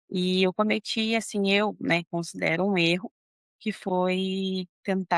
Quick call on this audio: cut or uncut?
uncut